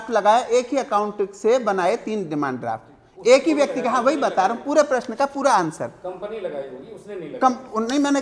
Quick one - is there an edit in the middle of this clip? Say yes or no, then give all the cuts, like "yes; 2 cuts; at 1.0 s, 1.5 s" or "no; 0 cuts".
no; 0 cuts